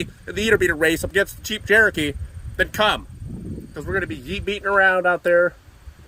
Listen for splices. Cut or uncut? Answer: uncut